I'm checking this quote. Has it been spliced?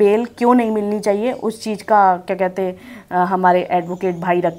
no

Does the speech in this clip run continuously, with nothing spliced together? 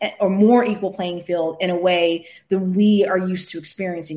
yes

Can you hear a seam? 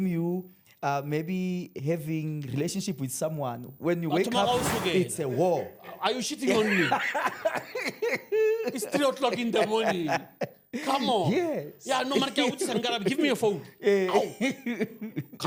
no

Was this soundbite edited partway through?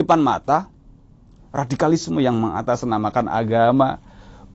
no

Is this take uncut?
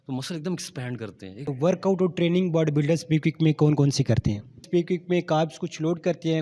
no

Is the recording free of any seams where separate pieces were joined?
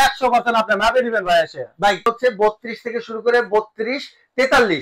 no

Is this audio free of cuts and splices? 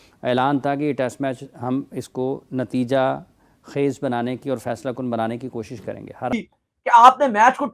no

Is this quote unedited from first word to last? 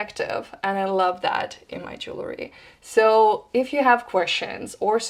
yes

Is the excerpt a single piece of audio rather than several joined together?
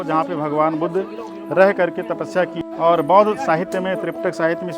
no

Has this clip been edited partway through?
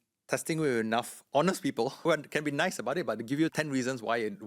yes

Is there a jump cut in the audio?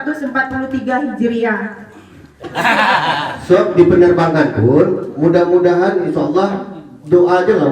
yes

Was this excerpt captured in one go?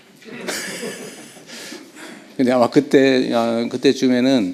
yes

